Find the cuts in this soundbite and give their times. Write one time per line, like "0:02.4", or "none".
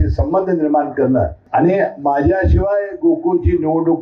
0:01.4